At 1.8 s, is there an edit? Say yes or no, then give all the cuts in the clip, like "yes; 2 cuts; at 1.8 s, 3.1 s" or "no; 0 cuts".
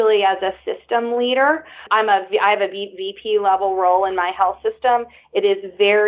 yes; 1 cut; at 1.8 s